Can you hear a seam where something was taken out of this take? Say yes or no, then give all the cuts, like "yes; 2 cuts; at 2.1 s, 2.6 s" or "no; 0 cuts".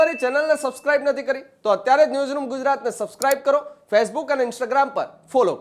no; 0 cuts